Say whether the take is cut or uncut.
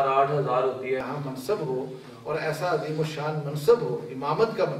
cut